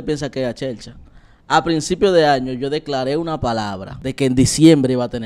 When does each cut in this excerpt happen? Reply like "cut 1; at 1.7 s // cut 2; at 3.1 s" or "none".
cut 1; at 3.9 s